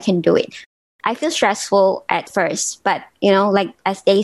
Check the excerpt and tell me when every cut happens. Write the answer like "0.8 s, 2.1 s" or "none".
0.9 s, 2.3 s